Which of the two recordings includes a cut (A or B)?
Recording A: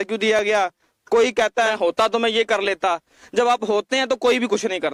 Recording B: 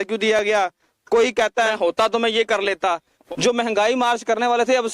B